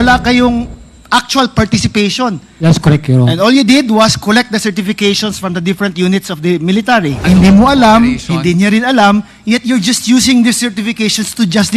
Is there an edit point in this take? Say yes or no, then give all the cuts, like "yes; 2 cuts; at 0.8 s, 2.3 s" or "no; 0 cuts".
yes; 2 cuts; at 2.5 s, 7.2 s